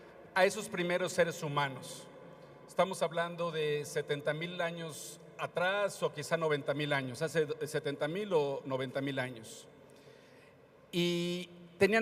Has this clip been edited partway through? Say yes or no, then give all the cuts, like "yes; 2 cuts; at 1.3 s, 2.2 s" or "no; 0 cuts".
yes; 1 cut; at 6.8 s